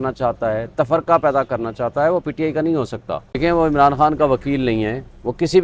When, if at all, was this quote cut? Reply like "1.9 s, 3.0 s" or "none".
3.3 s